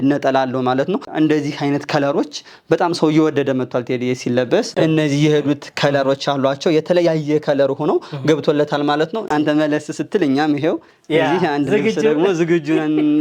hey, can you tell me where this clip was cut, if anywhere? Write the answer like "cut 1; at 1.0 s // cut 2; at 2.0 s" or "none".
cut 1; at 1.1 s // cut 2; at 4.7 s // cut 3; at 9.3 s